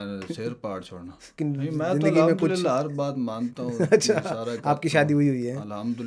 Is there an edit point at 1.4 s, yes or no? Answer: yes